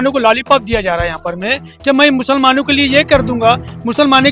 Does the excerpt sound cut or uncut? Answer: uncut